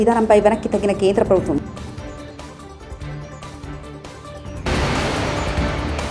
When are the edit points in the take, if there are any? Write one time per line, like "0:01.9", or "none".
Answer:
0:01.6
0:04.2